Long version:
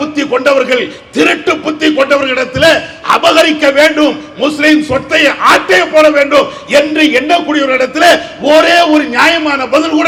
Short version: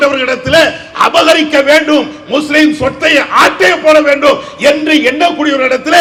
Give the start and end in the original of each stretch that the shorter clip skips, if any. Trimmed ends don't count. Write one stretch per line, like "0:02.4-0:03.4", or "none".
none